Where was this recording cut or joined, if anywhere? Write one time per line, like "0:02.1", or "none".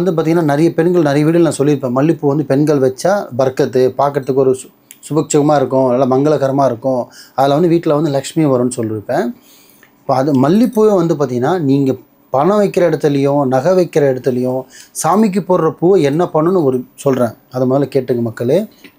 none